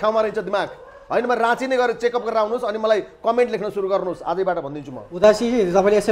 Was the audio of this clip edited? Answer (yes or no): no